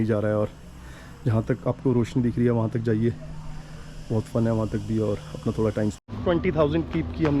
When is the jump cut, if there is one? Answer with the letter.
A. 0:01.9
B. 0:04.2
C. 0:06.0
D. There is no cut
C